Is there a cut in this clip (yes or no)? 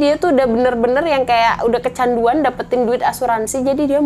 no